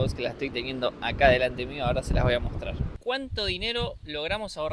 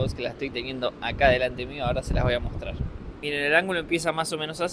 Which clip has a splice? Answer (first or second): first